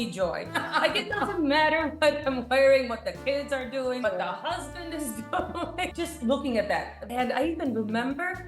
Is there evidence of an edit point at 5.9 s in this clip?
yes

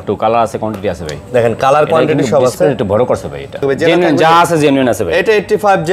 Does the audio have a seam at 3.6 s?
yes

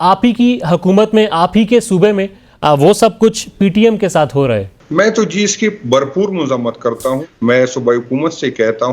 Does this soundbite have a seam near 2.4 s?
no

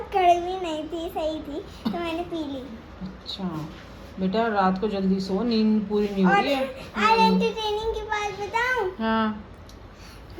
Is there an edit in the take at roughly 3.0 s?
no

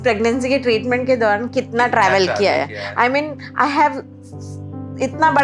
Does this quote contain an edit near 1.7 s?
no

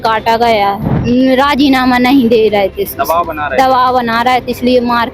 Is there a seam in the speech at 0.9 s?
yes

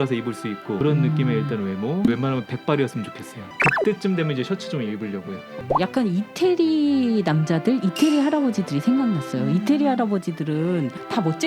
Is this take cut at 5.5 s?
yes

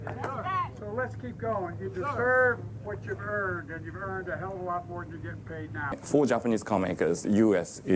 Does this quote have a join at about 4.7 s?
no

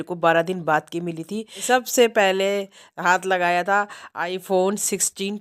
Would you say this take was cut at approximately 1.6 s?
yes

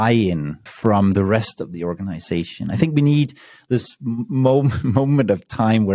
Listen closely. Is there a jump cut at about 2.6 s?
no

